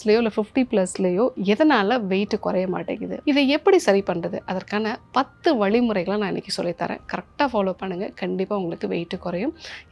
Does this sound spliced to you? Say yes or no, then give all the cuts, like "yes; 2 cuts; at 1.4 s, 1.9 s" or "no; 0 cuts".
yes; 1 cut; at 3.1 s